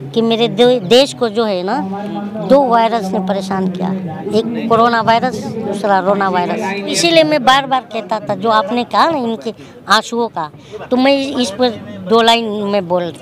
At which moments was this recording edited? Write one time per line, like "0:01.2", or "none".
0:04.2
0:06.9